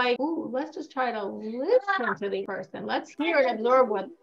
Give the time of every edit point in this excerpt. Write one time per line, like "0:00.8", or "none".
0:02.6